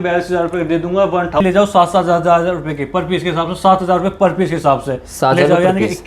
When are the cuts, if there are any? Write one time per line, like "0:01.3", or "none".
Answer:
0:01.4